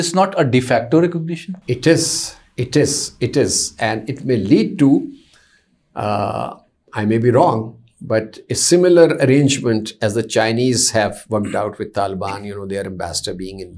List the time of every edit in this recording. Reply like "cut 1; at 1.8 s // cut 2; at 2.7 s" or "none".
none